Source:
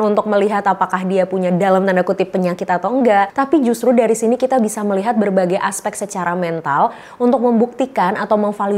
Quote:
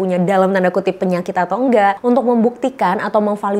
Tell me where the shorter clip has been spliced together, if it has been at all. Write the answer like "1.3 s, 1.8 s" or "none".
2.0 s